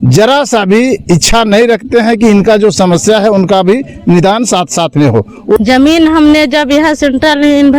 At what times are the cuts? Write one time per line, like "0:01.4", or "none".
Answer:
0:05.6